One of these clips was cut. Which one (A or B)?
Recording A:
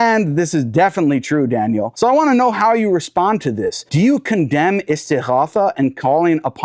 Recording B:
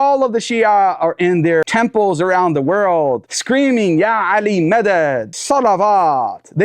B